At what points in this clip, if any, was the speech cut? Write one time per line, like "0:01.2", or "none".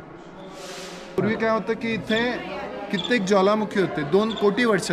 0:01.2